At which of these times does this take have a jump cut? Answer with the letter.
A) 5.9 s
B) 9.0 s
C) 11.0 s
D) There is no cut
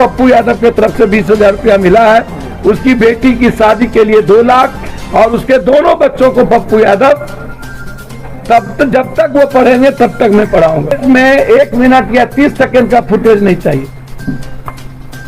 C